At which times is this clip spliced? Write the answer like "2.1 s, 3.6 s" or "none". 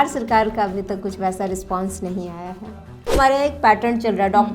3.2 s